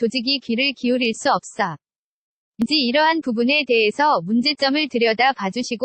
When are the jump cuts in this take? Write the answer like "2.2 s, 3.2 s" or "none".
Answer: 2.6 s